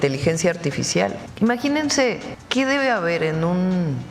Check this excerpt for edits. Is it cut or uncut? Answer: cut